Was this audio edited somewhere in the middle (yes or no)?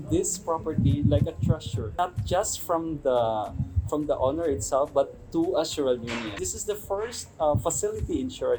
no